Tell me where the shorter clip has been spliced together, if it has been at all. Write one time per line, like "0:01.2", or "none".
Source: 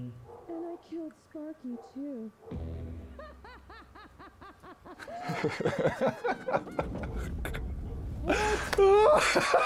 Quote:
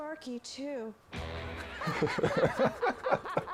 0:01.9